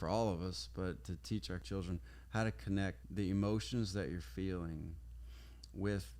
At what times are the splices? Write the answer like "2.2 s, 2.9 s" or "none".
1.6 s, 3.0 s